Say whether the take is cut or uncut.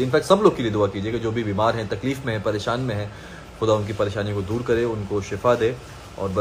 uncut